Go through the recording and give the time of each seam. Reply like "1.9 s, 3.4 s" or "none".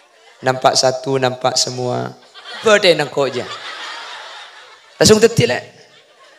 2.6 s